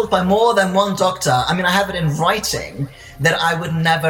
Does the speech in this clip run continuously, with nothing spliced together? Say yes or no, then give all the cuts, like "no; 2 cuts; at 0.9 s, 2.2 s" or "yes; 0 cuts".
yes; 0 cuts